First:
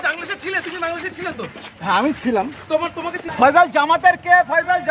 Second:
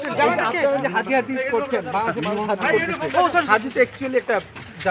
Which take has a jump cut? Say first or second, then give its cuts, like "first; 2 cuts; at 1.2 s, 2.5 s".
first; 1 cut; at 3.2 s